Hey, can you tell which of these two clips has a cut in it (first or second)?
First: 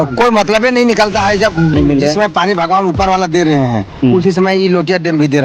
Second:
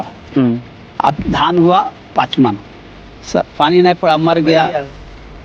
first